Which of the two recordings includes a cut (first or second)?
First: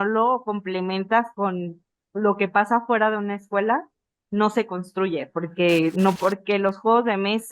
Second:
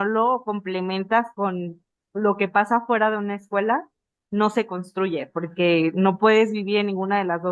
first